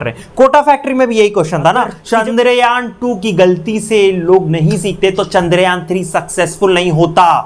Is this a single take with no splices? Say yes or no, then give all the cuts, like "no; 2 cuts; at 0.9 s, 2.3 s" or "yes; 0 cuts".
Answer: no; 1 cut; at 2.0 s